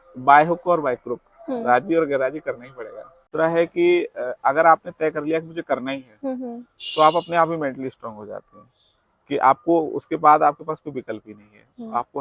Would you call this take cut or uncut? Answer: cut